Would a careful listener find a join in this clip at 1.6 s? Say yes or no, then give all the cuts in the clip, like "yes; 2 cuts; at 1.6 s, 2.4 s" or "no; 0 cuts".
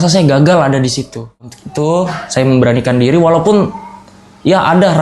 yes; 1 cut; at 1.6 s